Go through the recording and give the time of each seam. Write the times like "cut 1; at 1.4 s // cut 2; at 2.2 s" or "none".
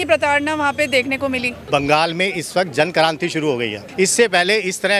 cut 1; at 1.5 s // cut 2; at 3.8 s